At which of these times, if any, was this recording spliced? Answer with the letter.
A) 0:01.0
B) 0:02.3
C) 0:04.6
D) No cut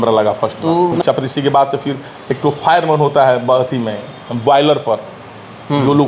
A